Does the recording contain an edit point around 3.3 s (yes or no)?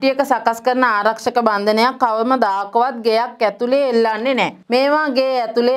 no